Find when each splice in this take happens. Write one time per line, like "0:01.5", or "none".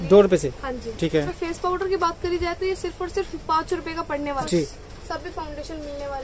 0:01.3
0:04.4